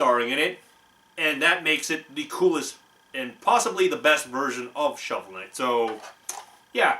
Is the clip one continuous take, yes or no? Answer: no